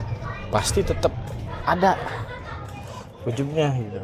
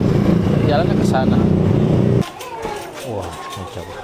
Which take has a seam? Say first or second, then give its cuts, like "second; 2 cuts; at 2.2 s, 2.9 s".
second; 1 cut; at 2.2 s